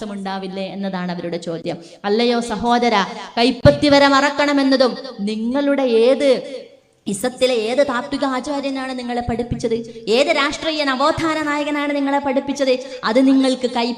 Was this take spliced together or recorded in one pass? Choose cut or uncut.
uncut